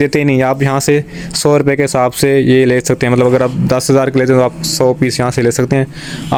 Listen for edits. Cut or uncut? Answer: uncut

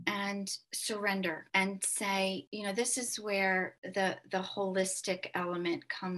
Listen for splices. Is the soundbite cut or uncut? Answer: uncut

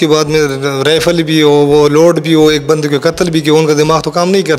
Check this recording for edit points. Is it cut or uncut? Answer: uncut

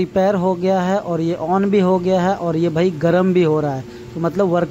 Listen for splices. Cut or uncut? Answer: uncut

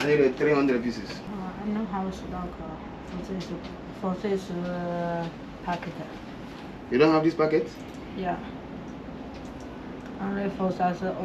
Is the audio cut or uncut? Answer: cut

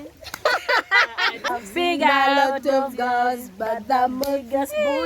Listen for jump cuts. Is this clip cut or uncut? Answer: cut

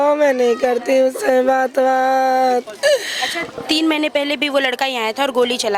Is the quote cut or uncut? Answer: uncut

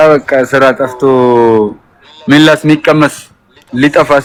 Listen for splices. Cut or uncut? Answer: uncut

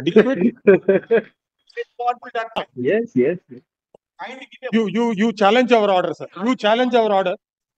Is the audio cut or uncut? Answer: cut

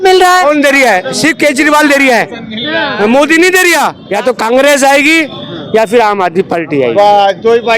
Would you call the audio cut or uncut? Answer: cut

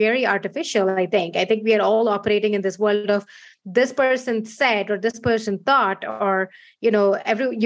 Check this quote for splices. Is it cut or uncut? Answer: uncut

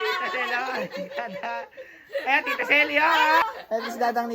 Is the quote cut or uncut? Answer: cut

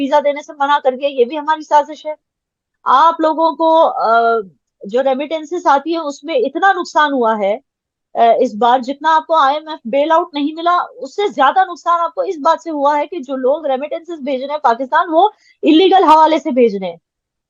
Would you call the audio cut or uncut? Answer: uncut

